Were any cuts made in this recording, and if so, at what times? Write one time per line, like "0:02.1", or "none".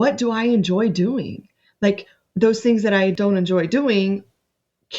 0:02.2
0:03.2